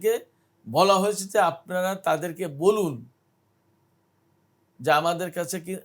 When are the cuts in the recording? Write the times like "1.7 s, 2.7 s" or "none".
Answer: none